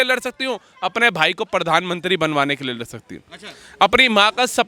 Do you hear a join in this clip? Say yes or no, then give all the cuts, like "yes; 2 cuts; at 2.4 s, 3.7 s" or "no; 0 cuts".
no; 0 cuts